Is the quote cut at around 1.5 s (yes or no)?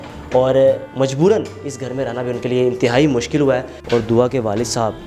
no